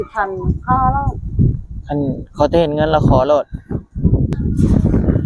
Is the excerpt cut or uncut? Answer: cut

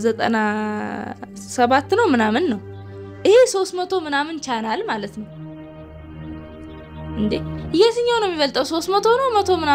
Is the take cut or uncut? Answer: uncut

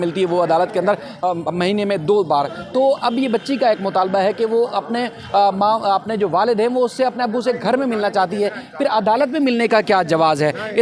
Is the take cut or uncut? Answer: uncut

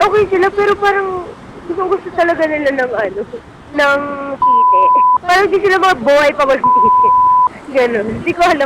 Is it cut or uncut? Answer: cut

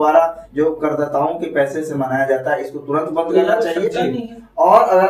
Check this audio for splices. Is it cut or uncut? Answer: uncut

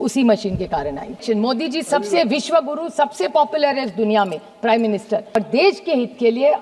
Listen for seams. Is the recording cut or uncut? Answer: cut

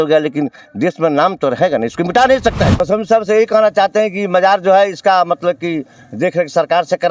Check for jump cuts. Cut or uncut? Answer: cut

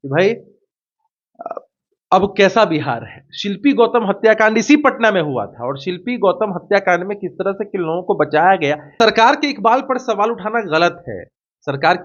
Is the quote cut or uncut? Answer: cut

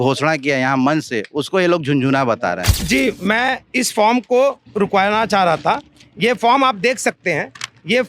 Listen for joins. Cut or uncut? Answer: cut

